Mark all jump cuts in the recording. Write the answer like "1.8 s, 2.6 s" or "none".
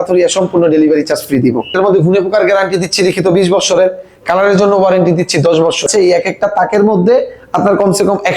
1.7 s, 5.9 s